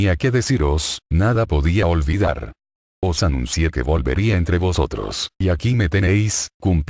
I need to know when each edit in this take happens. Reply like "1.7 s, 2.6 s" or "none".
2.1 s

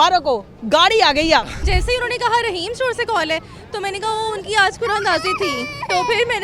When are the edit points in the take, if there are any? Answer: 1.6 s

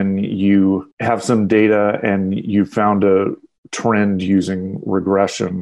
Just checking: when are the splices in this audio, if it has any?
0.9 s

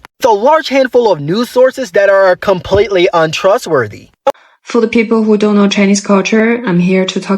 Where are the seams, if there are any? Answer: 4.3 s

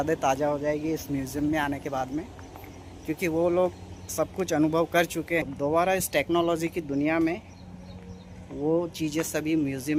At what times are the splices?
none

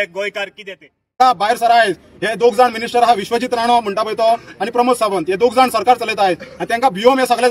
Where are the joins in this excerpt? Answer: 1.2 s

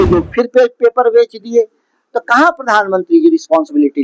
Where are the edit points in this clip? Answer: none

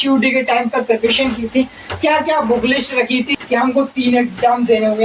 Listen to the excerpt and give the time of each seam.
3.3 s

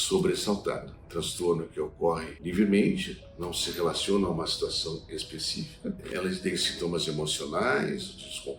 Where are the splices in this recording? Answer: 0.9 s, 2.3 s, 6.0 s

